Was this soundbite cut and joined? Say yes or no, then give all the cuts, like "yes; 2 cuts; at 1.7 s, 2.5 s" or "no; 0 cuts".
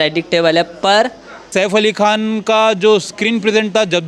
yes; 1 cut; at 1.4 s